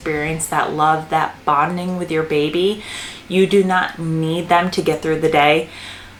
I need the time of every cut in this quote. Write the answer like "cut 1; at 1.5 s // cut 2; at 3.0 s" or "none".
none